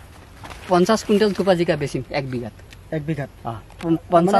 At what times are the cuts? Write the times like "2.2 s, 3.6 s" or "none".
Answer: none